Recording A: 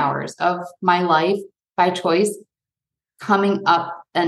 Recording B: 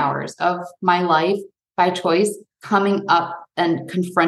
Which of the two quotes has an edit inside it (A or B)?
B